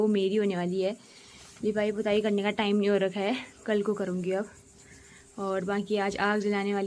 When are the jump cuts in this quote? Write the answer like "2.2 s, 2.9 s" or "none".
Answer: none